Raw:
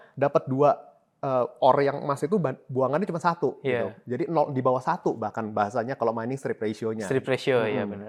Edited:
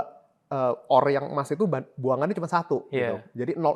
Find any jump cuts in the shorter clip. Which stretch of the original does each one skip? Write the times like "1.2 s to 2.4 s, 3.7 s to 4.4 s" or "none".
none